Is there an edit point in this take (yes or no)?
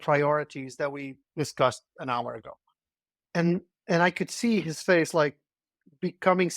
yes